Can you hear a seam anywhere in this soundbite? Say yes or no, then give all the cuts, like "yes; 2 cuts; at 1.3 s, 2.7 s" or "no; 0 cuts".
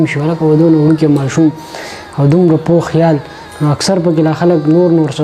no; 0 cuts